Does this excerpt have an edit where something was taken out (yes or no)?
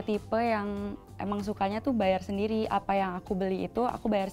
no